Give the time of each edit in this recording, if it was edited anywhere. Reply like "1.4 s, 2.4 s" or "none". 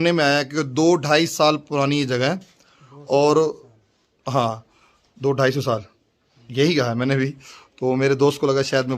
none